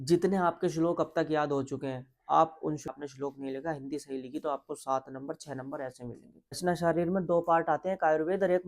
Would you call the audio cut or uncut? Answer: cut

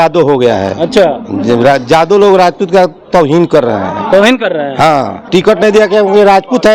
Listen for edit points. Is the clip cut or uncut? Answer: cut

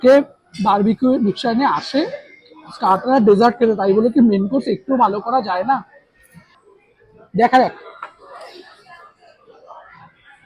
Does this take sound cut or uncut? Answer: cut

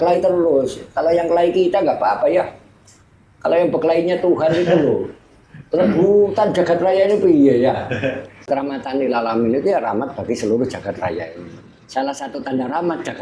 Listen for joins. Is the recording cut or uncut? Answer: cut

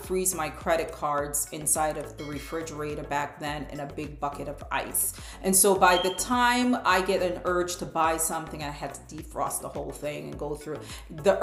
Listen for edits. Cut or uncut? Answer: uncut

